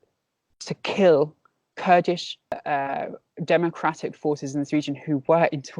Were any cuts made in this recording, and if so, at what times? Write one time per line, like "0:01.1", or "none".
0:02.6